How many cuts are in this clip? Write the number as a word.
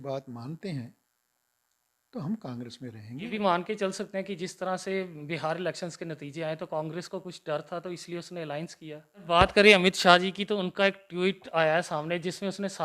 two